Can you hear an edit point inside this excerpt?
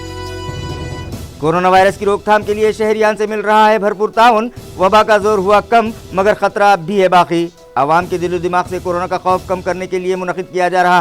no; 0 cuts

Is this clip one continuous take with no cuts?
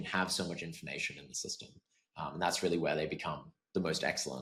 yes; 0 cuts

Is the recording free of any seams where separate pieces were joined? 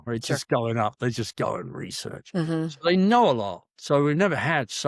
yes; 0 cuts

